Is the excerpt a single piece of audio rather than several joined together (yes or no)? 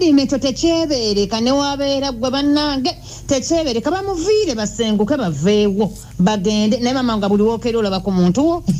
yes